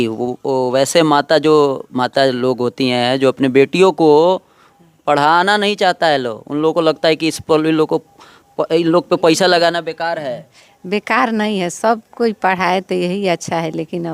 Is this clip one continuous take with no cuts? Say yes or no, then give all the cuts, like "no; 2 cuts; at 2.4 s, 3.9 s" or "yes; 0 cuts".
yes; 0 cuts